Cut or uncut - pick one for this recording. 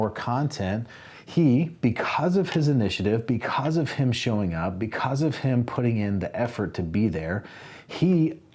uncut